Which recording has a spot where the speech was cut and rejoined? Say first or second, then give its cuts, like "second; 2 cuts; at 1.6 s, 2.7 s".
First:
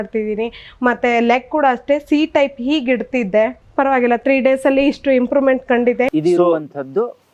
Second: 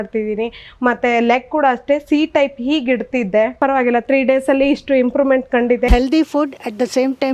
second; 2 cuts; at 3.5 s, 5.9 s